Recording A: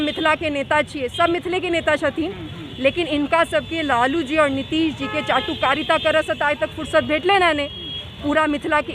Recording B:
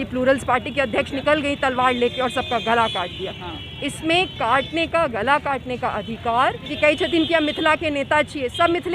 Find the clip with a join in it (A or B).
B